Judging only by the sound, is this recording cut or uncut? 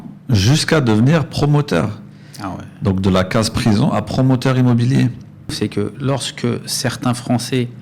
cut